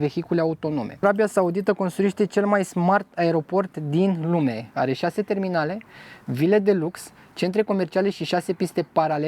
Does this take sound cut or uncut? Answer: cut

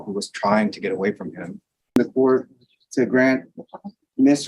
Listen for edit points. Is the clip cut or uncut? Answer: cut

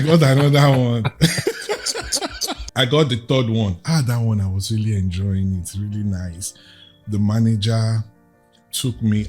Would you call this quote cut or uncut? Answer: cut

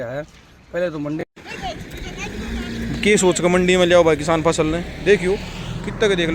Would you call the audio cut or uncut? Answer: cut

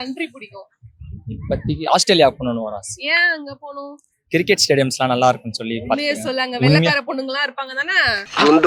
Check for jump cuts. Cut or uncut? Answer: uncut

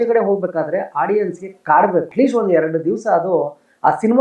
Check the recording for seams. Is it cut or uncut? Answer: cut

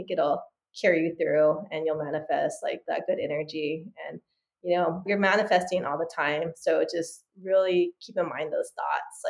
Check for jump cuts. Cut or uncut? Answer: cut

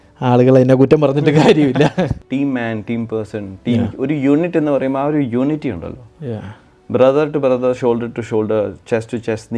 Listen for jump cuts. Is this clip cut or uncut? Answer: cut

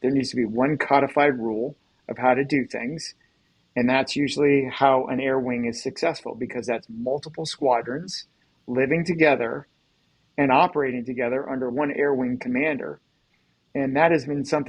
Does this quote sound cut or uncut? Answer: cut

